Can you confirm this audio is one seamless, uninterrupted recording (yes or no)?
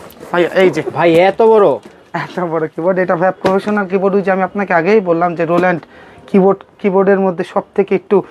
yes